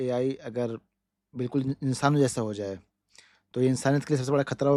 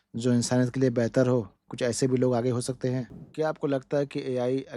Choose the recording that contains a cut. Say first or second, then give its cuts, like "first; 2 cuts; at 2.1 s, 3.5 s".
second; 1 cut; at 3.2 s